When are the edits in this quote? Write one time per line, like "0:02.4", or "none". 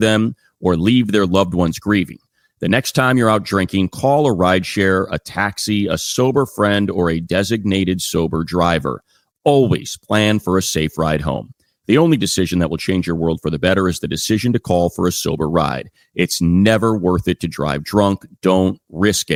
none